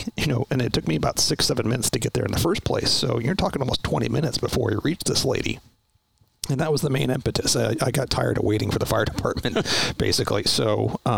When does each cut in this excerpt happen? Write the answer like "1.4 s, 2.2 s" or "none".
none